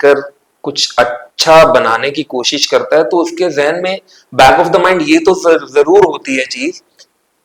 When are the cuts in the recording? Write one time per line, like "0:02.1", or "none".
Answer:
none